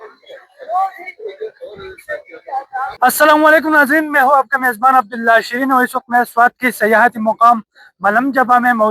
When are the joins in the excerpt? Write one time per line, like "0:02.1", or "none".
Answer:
0:02.9